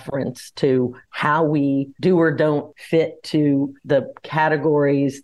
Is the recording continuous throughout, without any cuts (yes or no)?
no